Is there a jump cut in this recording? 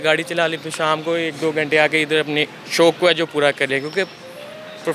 no; 0 cuts

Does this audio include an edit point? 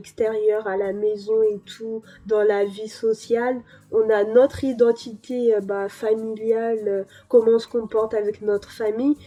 no; 0 cuts

